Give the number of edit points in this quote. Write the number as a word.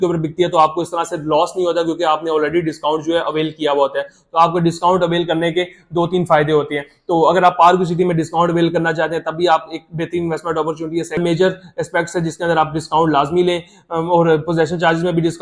one